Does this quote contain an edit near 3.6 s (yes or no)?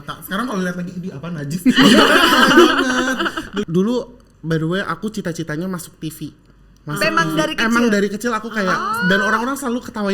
yes